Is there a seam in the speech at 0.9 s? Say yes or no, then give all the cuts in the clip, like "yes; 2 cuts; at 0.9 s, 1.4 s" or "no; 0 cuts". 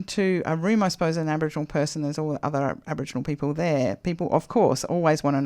no; 0 cuts